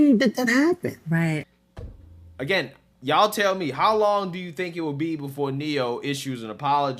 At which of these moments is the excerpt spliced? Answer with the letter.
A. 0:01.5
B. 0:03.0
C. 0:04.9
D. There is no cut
A